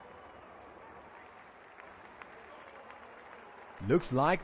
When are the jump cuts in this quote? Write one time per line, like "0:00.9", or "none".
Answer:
none